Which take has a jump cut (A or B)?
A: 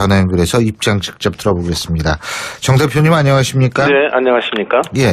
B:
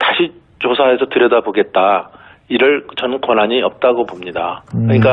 B